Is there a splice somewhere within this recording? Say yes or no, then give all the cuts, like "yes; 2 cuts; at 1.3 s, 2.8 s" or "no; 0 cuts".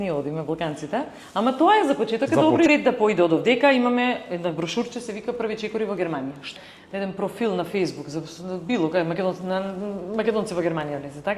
yes; 2 cuts; at 2.7 s, 6.5 s